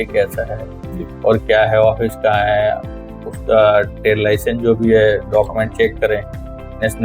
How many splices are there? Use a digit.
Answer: 0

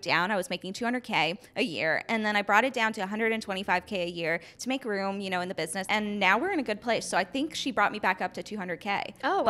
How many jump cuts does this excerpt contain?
1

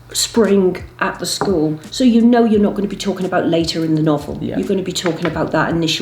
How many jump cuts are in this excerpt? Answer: 0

